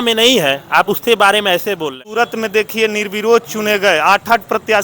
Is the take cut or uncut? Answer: cut